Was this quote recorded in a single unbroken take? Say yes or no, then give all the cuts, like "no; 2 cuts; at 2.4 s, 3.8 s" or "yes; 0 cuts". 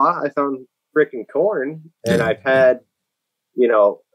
yes; 0 cuts